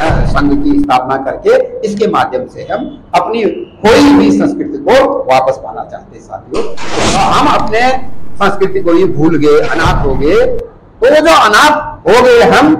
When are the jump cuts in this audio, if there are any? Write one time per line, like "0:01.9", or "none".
0:06.9